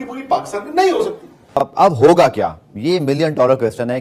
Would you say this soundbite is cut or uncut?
uncut